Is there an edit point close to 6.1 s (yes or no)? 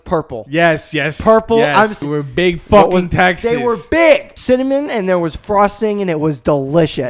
no